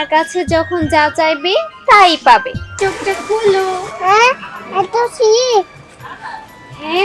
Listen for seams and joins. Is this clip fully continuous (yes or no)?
no